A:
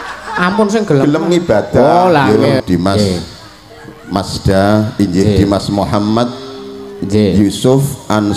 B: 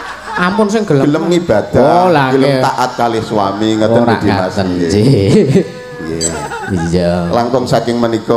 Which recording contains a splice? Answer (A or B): A